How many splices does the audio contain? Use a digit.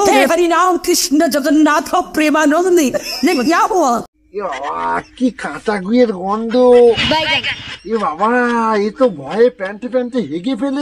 0